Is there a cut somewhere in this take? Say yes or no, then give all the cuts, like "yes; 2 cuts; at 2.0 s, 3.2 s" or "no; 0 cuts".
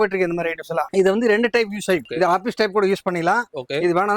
yes; 2 cuts; at 0.9 s, 2.1 s